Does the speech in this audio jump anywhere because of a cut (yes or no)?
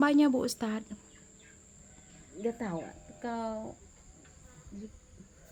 no